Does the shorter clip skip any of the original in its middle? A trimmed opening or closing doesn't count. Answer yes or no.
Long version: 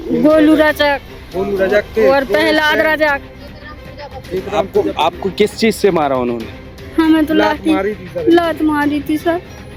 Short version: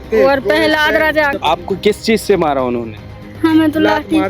yes